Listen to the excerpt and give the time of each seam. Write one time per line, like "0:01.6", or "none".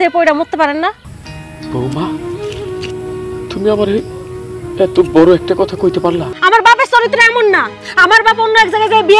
0:06.3